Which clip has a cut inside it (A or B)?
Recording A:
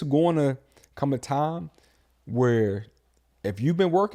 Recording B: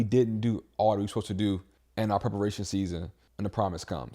B